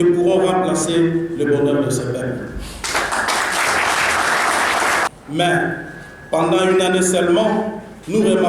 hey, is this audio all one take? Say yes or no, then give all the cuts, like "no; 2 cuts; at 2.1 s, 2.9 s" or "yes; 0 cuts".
no; 1 cut; at 5.1 s